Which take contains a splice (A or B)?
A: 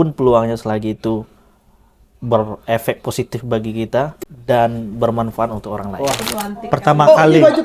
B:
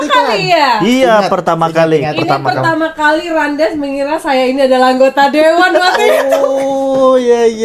A